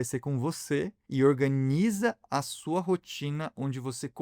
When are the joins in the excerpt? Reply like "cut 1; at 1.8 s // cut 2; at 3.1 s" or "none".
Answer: cut 1; at 1.0 s